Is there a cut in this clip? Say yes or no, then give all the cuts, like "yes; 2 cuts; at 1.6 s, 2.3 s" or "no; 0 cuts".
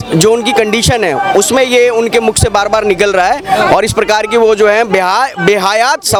no; 0 cuts